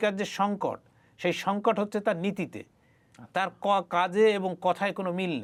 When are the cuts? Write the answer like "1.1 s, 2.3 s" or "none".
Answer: none

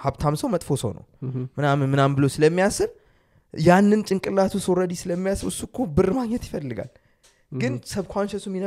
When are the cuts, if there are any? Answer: none

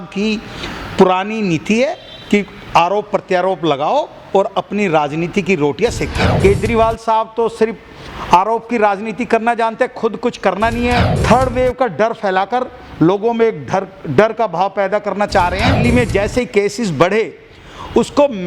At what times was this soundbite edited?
6.4 s, 11.1 s, 15.8 s

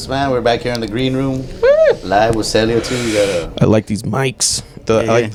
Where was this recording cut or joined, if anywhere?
none

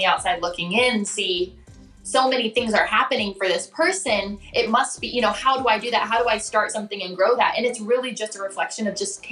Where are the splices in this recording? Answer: none

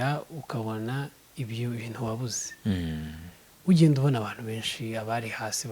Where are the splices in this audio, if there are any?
none

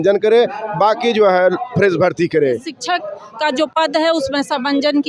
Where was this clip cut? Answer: 2.7 s

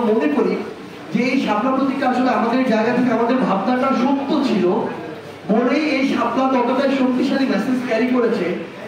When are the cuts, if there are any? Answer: none

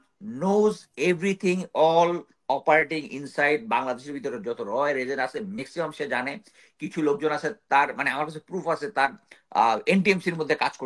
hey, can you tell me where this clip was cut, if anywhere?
none

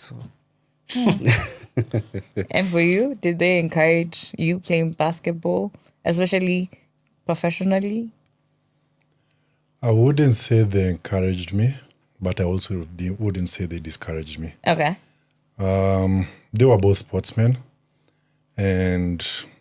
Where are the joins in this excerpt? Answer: none

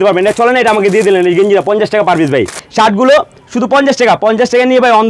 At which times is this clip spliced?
2.6 s

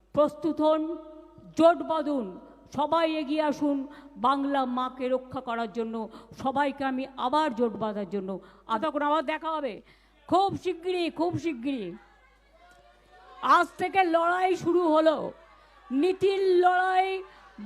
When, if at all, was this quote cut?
8.8 s

